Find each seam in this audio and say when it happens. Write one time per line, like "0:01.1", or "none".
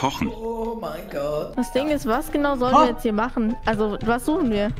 0:01.5